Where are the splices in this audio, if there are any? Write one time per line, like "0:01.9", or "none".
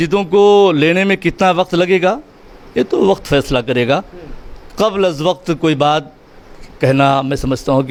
none